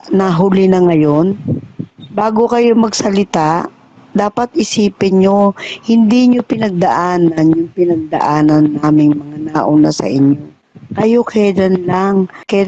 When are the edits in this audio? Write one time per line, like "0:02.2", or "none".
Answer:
none